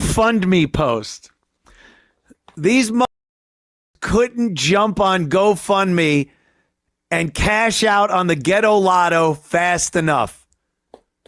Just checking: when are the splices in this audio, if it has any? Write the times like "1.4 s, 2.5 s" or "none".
none